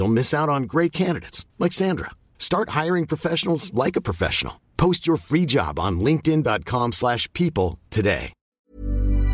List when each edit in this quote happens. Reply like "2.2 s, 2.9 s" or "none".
8.4 s